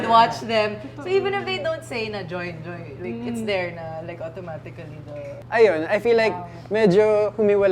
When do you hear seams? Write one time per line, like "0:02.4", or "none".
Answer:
0:05.4